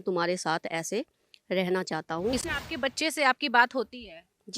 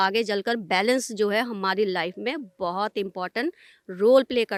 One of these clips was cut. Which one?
first; 1 cut; at 2.4 s

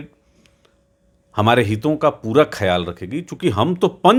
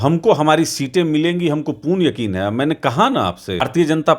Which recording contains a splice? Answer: second; 1 cut; at 3.1 s

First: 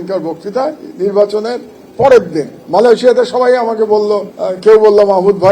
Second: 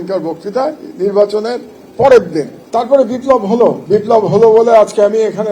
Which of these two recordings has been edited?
second; 2 cuts; at 2.6 s, 3.8 s

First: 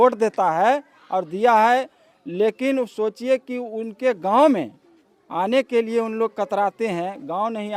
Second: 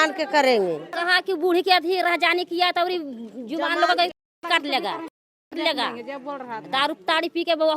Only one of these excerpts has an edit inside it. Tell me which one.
second; 1 cut; at 0.9 s

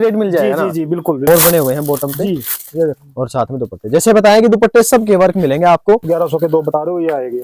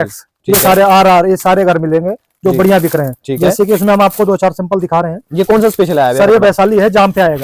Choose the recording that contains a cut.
first; 2 cuts; at 1.3 s, 6.0 s

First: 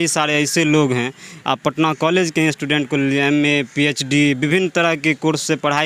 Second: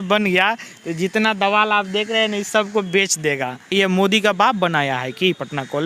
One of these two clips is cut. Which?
second; 1 cut; at 3.7 s

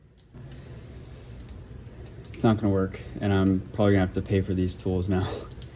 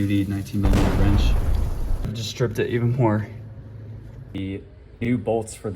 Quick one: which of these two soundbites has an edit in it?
second; 2 cuts; at 2.2 s, 4.4 s

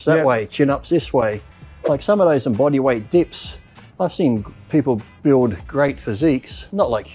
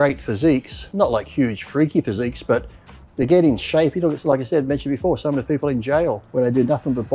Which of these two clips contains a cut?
second; 1 cut; at 6.2 s

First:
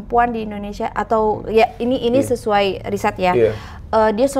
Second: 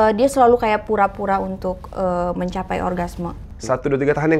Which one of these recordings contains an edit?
second; 1 cut; at 3.4 s

